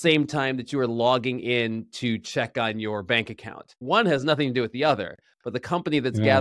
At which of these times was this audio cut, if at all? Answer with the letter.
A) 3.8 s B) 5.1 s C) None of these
A